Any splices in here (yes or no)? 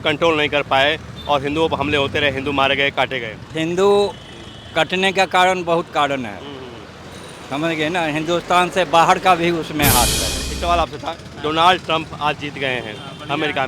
yes